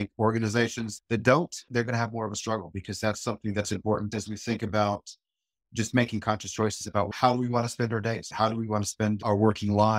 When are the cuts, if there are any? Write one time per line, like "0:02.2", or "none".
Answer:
0:04.1
0:07.1
0:08.3